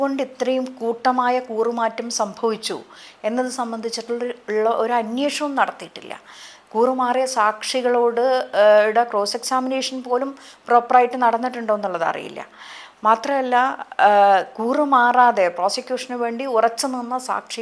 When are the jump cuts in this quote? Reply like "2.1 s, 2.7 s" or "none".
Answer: none